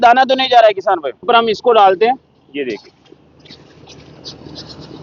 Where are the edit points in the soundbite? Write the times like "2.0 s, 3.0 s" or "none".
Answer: 1.3 s